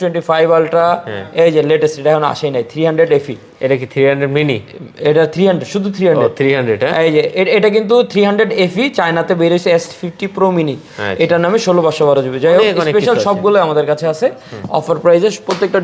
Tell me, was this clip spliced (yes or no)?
no